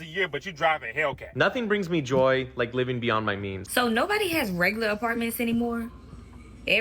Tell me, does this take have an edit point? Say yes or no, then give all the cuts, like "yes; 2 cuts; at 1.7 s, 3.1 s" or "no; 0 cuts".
yes; 2 cuts; at 1.3 s, 3.6 s